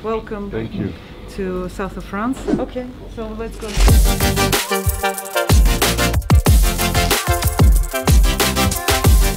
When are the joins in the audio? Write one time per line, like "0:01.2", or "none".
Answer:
0:02.4